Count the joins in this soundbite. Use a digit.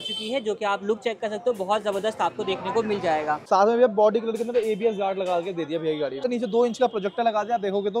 2